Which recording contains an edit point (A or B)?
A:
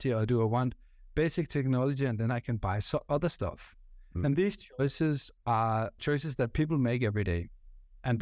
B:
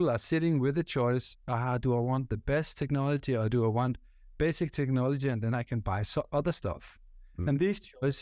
A